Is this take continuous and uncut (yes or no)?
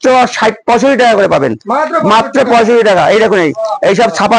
yes